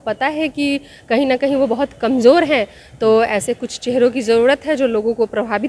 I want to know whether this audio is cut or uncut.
uncut